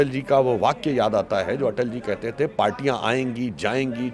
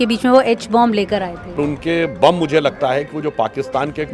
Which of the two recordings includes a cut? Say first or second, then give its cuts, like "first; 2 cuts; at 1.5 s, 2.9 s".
second; 1 cut; at 1.6 s